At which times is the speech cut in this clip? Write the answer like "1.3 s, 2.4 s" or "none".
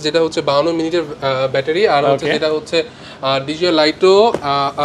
none